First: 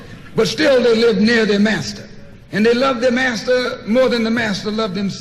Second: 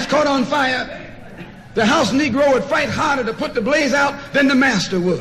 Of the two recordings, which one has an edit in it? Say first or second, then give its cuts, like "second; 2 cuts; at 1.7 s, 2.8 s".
first; 1 cut; at 1.1 s